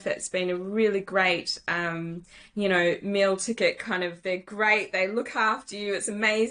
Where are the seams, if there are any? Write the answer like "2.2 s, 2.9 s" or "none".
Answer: none